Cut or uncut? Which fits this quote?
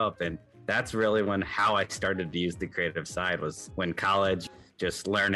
cut